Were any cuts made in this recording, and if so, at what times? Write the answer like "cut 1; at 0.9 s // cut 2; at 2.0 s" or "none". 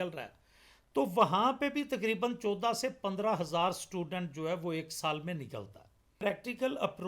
cut 1; at 6.2 s